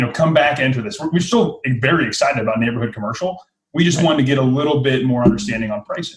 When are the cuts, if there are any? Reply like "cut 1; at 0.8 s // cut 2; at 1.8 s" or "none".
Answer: none